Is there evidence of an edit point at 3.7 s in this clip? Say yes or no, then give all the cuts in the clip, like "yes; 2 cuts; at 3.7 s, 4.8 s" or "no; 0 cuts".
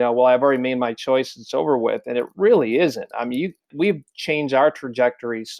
yes; 1 cut; at 3.7 s